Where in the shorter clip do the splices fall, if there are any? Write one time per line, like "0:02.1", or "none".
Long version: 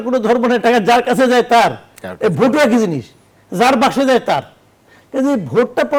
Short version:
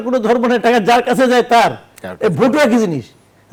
none